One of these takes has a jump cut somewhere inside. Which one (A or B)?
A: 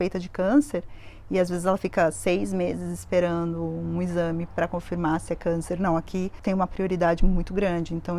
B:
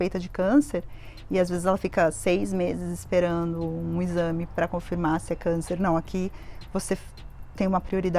A